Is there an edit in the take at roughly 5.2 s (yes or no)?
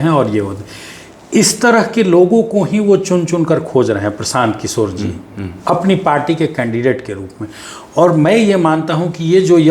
no